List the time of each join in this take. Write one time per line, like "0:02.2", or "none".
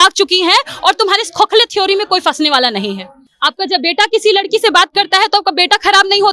0:03.2